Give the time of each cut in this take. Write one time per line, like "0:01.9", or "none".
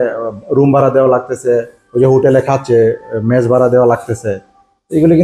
none